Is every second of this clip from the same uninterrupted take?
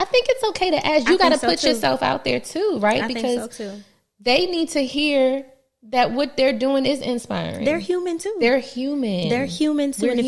yes; 0 cuts

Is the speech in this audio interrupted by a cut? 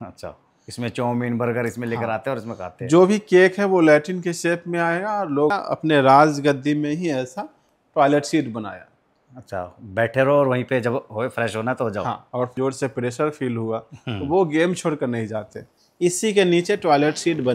yes; 2 cuts; at 5.5 s, 12.5 s

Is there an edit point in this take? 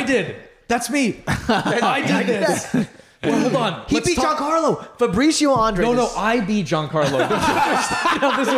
no; 0 cuts

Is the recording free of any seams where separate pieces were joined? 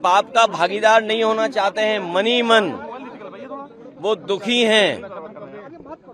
yes; 0 cuts

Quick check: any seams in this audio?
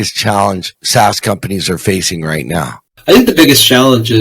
yes; 1 cut; at 2.9 s

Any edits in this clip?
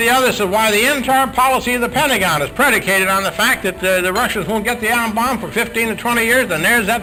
no; 0 cuts

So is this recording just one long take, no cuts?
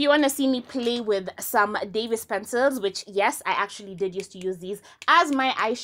yes; 0 cuts

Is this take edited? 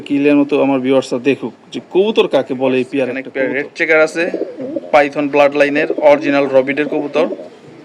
yes; 1 cut; at 3.2 s

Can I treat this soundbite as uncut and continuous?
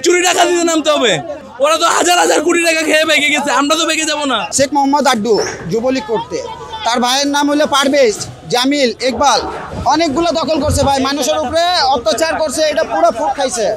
no; 3 cuts; at 1.5 s, 4.5 s, 9.6 s

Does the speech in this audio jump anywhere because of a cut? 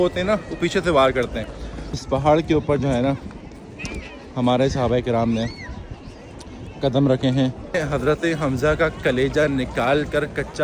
yes; 2 cuts; at 2.0 s, 7.8 s

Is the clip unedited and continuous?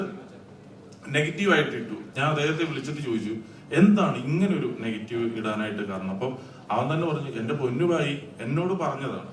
no; 1 cut; at 2.0 s

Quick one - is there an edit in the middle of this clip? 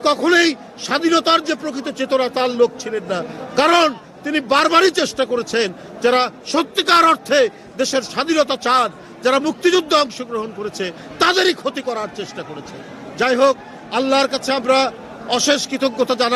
no; 0 cuts

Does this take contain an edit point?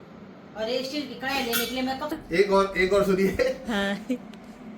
yes; 1 cut; at 2.2 s

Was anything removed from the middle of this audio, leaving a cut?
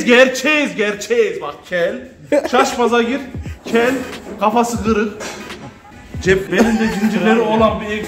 no; 0 cuts

